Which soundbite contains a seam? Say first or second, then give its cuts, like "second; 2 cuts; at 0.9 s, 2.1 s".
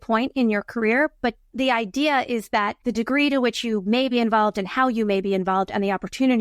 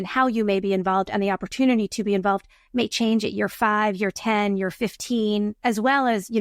first; 2 cuts; at 1.5 s, 2.8 s